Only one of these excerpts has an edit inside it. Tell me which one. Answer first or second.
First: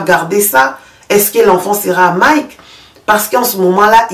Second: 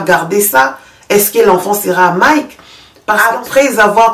second